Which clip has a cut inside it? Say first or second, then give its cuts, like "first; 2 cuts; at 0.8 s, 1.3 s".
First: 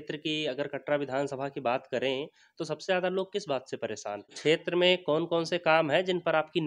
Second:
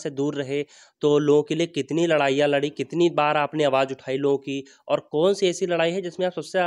first; 1 cut; at 4.3 s